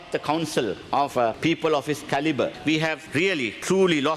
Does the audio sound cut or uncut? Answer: cut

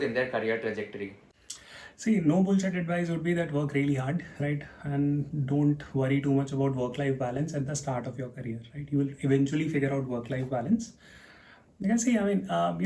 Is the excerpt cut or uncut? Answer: uncut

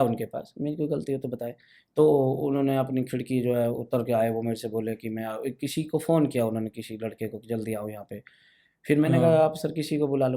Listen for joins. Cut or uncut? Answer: uncut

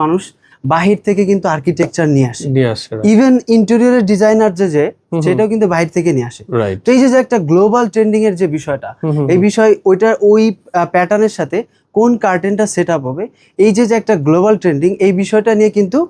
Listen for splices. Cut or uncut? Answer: uncut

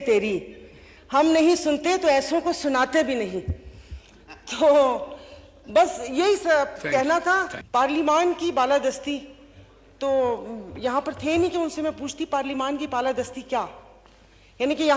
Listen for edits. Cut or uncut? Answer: cut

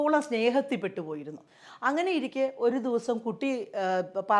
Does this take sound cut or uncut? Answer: uncut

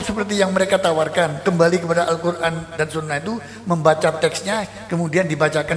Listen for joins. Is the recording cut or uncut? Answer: uncut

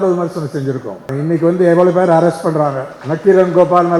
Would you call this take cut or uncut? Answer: cut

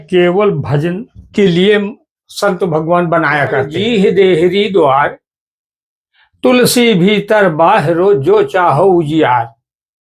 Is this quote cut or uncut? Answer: cut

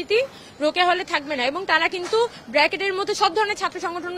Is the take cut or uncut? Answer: uncut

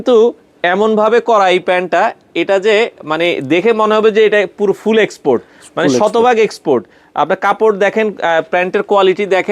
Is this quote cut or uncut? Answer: uncut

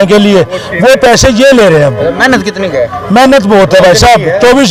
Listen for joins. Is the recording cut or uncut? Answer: uncut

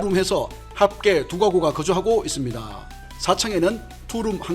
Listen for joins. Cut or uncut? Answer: cut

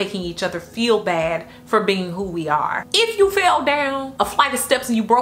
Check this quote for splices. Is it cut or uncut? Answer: cut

